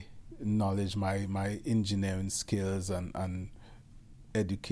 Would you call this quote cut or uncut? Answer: uncut